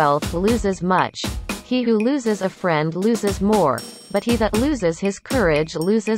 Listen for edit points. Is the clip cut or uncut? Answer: uncut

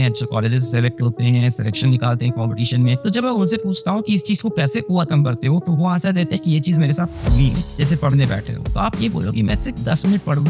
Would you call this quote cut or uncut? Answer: cut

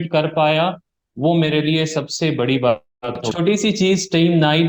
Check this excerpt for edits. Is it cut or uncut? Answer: cut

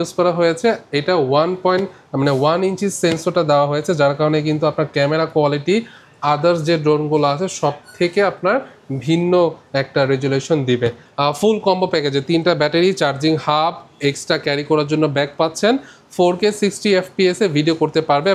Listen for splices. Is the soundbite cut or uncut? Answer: cut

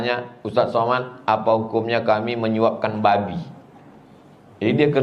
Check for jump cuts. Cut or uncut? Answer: uncut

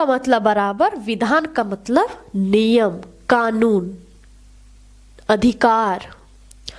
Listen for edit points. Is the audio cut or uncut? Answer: uncut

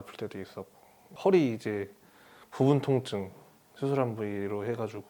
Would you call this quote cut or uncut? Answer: uncut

